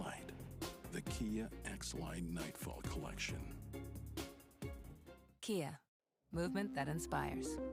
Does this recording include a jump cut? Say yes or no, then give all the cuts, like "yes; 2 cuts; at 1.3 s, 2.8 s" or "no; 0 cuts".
no; 0 cuts